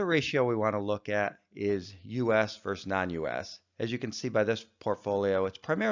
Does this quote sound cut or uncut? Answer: uncut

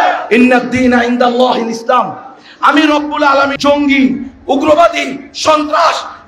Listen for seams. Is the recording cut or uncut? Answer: cut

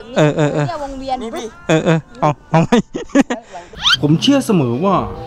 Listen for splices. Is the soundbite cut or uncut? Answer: cut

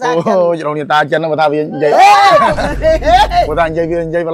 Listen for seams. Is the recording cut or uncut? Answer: uncut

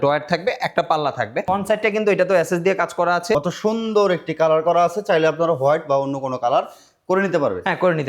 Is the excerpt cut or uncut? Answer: cut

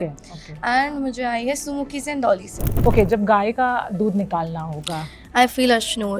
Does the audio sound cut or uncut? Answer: cut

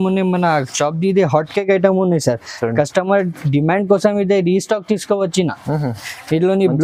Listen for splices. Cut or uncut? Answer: uncut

